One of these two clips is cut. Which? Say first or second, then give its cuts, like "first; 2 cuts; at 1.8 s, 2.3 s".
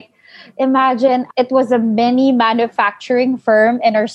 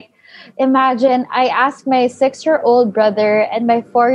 first; 1 cut; at 1.3 s